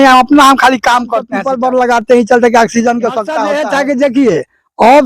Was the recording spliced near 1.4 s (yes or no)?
yes